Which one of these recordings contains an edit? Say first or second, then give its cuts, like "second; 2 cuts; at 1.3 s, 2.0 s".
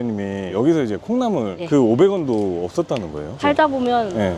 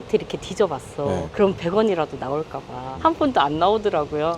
second; 1 cut; at 2.8 s